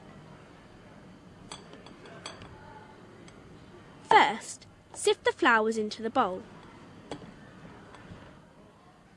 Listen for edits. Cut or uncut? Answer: uncut